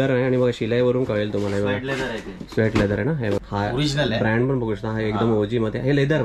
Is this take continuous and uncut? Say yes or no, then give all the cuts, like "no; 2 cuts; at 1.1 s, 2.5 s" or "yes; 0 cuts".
no; 1 cut; at 3.4 s